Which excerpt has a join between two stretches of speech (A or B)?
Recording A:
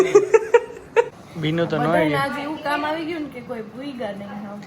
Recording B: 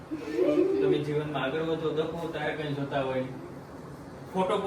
A